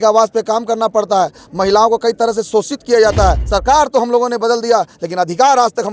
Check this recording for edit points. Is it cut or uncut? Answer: cut